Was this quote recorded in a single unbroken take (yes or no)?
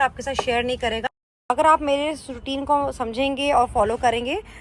no